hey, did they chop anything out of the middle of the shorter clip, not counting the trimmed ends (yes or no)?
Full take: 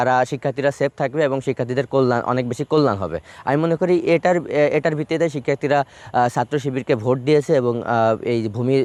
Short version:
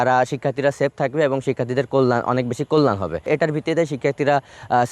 yes